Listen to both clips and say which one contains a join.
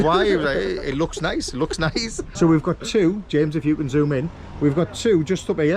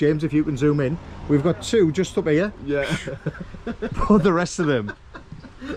first; 1 cut; at 2.3 s

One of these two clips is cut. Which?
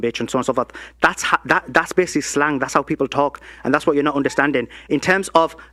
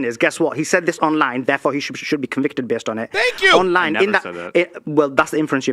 second; 1 cut; at 4.8 s

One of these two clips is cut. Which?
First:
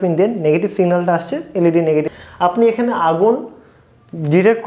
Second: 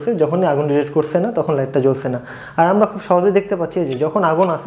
first; 1 cut; at 2.1 s

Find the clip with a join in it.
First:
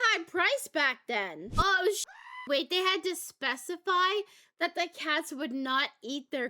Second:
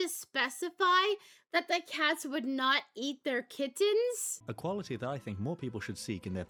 first; 1 cut; at 1.4 s

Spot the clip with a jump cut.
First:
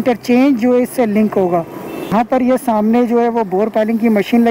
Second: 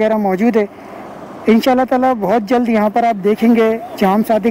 first; 1 cut; at 2.1 s

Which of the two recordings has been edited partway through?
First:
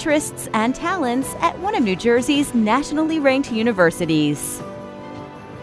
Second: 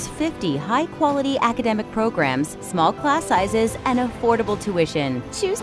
first; 1 cut; at 4.4 s

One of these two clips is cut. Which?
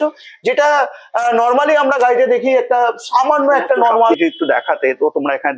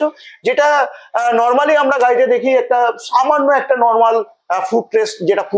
first; 1 cut; at 4.1 s

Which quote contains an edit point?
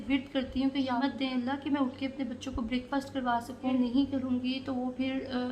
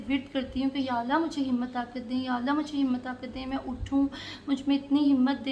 first; 2 cuts; at 1.0 s, 3.7 s

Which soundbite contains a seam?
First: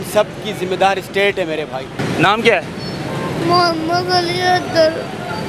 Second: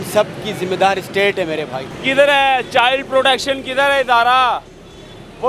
first; 1 cut; at 2.0 s

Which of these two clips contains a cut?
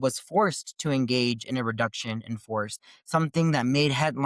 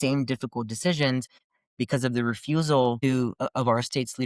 second; 2 cuts; at 1.4 s, 3.0 s

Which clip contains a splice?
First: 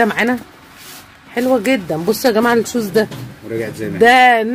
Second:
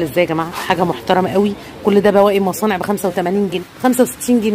second; 1 cut; at 3.6 s

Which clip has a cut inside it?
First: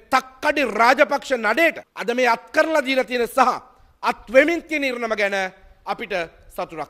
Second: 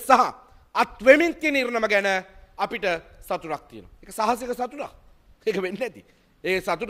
first; 1 cut; at 1.9 s

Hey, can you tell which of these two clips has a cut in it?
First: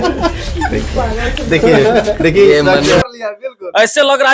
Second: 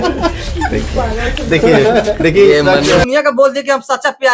first; 1 cut; at 3.1 s

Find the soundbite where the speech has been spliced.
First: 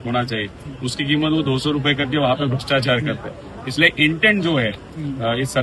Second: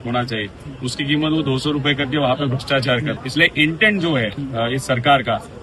second; 2 cuts; at 3.2 s, 4.4 s

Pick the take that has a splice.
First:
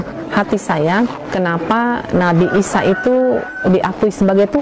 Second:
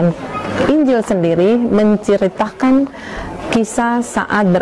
first; 2 cuts; at 1.3 s, 3.5 s

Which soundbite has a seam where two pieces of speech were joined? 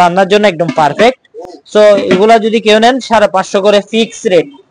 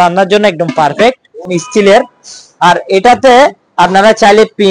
second; 1 cut; at 1.4 s

